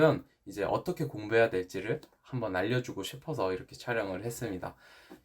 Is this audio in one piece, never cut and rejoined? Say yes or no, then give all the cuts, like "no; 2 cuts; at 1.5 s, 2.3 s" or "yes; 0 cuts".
yes; 0 cuts